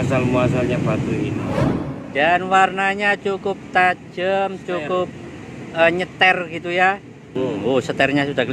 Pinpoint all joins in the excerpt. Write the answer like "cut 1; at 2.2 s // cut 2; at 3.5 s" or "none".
cut 1; at 1.5 s // cut 2; at 7.3 s